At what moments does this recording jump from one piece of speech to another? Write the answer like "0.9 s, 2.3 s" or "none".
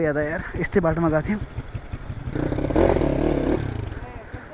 2.2 s

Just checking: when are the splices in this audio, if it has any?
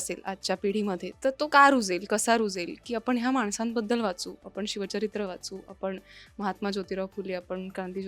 1.3 s

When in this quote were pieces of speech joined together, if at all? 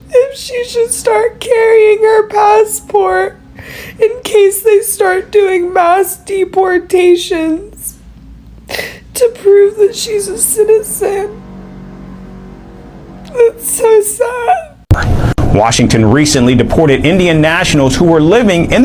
none

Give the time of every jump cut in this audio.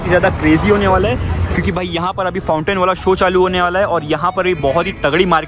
none

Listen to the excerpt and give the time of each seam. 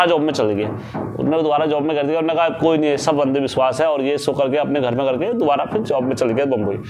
none

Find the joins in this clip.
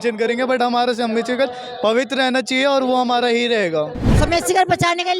4.0 s

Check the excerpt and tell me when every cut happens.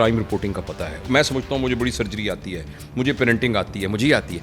1.0 s

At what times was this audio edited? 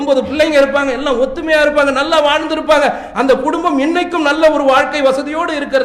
none

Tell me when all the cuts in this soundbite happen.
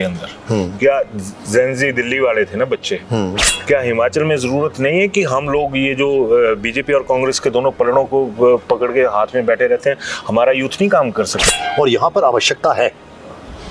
3.5 s, 11.4 s

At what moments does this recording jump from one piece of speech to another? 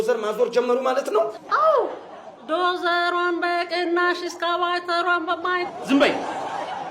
1.4 s

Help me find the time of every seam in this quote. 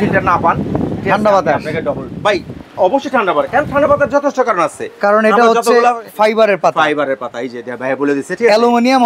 none

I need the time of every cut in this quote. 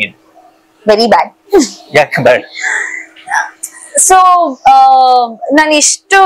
none

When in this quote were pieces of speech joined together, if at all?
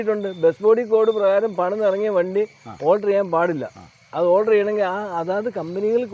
none

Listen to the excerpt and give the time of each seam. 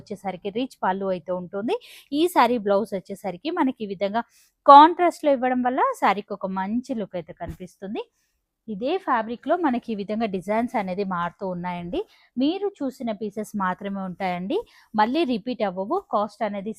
none

